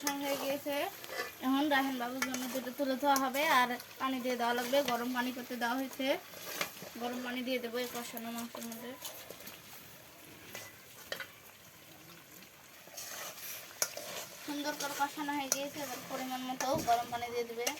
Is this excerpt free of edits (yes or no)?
yes